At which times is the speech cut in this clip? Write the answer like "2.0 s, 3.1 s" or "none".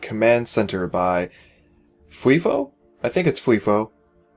2.7 s